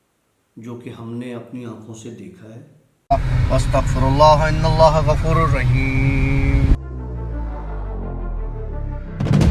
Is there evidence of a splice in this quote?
yes; 1 cut; at 2.9 s

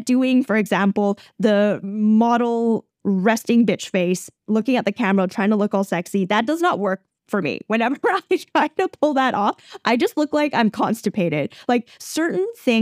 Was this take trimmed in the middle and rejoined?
no; 0 cuts

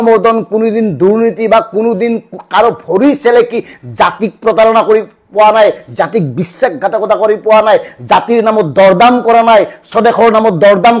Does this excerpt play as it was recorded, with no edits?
yes; 0 cuts

